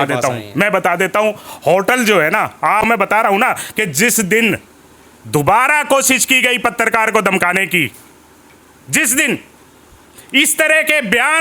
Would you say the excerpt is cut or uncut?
cut